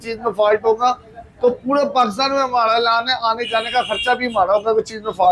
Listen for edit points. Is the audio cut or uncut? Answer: uncut